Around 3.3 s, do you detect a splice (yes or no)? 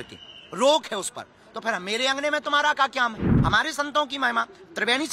yes